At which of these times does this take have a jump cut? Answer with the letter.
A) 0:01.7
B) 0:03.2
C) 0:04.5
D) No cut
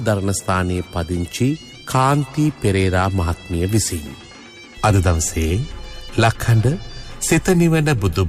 C